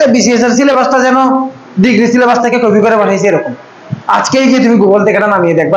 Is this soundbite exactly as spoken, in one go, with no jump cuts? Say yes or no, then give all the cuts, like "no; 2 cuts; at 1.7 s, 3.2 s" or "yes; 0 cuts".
yes; 0 cuts